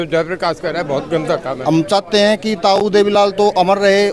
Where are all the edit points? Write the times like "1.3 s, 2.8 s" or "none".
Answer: 1.6 s